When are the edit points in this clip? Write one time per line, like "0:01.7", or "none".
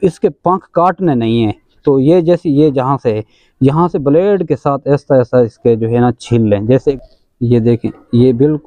0:07.0